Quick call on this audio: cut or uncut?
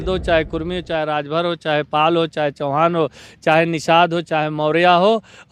uncut